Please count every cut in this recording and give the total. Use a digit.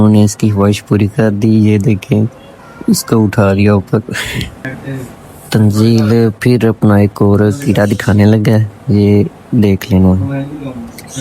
1